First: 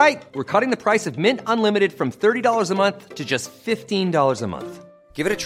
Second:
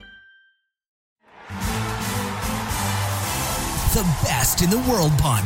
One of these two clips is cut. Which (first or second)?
second